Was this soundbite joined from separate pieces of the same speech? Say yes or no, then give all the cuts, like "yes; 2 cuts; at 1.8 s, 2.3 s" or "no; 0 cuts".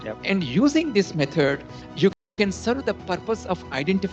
no; 0 cuts